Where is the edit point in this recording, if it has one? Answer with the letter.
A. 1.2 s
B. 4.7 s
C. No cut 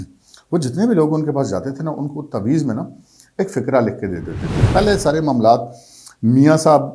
B